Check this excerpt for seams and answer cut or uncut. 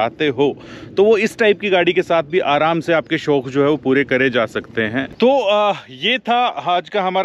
uncut